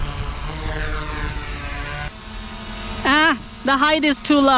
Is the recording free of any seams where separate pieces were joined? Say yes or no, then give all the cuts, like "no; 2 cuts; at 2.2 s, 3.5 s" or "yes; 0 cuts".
no; 1 cut; at 2.1 s